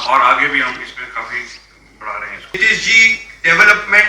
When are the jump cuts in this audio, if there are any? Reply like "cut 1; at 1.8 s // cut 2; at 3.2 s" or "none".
cut 1; at 2.5 s

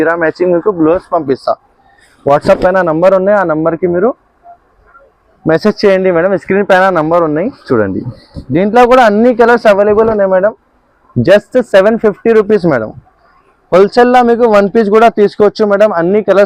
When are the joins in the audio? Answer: none

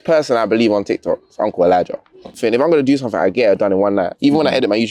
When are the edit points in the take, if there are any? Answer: cut 1; at 2.3 s

